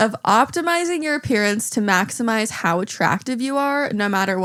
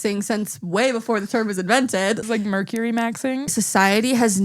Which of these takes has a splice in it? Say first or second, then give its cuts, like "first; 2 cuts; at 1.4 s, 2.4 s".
second; 2 cuts; at 2.2 s, 3.5 s